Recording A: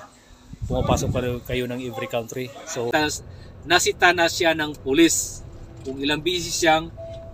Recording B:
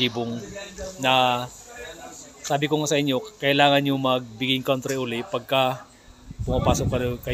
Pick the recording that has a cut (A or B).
A